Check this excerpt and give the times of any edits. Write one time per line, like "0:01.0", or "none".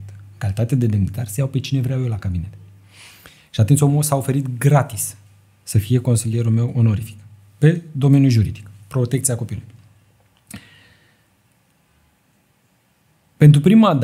none